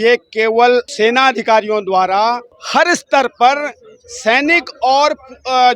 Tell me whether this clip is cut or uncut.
cut